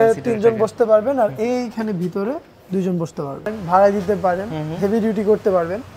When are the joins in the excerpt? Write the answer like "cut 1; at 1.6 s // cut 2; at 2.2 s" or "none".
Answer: cut 1; at 3.6 s